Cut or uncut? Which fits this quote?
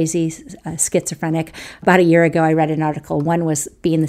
cut